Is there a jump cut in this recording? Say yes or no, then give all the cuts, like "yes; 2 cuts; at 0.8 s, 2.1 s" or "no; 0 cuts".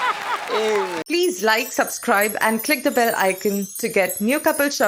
yes; 1 cut; at 1.0 s